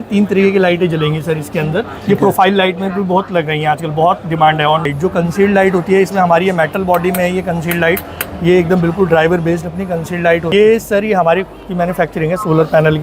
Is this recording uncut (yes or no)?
no